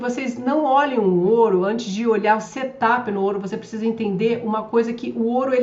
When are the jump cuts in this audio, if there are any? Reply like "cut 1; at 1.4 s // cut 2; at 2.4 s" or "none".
none